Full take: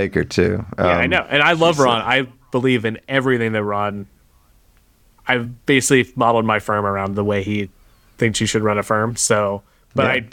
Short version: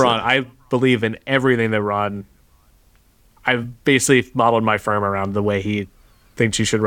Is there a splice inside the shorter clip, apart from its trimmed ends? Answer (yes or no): no